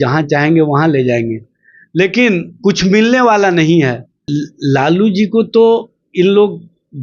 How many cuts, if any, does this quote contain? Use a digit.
1